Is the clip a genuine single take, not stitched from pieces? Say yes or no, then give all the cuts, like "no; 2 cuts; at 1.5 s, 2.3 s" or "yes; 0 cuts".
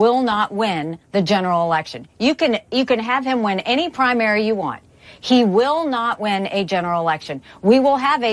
yes; 0 cuts